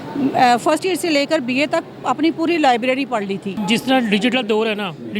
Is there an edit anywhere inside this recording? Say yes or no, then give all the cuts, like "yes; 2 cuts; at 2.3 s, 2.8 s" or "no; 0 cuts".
yes; 1 cut; at 3.5 s